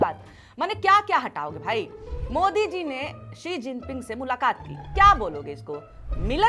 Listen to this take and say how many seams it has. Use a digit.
0